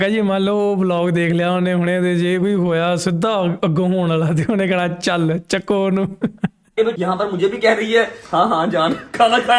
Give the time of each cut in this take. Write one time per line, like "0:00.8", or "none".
0:07.0